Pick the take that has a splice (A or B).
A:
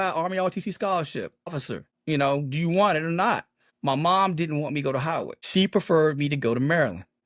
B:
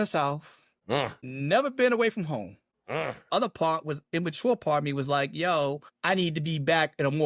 B